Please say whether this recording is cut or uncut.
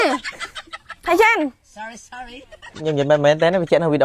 cut